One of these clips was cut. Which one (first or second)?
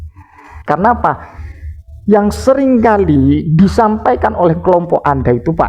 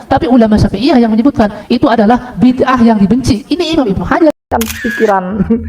second